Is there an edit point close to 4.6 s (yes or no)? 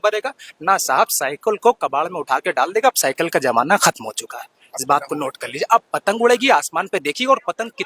no